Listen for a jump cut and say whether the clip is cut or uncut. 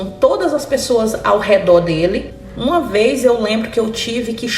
cut